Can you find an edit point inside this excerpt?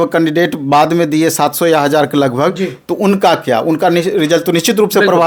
no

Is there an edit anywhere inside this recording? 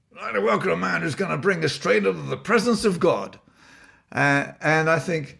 no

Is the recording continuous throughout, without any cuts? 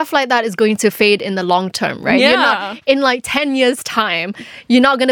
yes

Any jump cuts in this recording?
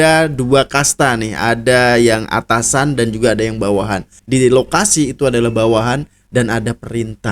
yes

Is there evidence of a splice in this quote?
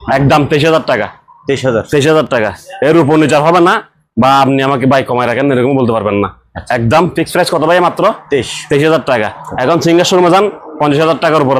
no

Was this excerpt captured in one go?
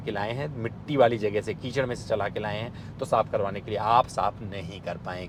yes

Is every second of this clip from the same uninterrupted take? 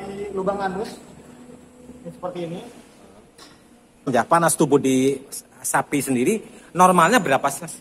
no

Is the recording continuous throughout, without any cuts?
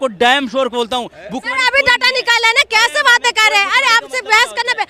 yes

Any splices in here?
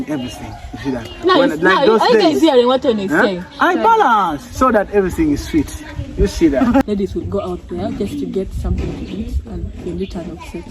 yes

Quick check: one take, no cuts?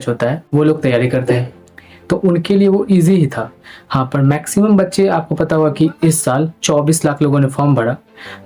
yes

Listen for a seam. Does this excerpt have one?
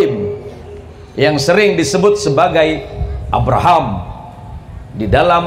no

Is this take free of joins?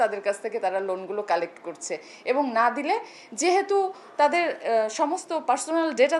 yes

